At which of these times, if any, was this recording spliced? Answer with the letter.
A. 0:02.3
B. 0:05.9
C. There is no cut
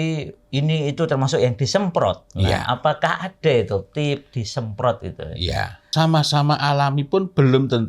B